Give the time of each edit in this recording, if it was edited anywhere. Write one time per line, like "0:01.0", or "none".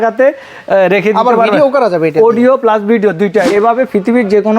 0:03.5